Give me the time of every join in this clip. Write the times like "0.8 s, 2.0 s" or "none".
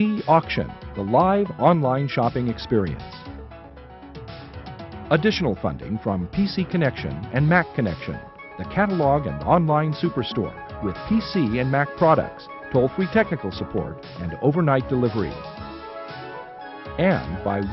3.0 s, 4.9 s